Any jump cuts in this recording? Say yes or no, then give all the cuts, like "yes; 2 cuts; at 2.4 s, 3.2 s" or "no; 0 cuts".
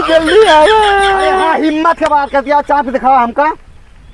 yes; 1 cut; at 1.4 s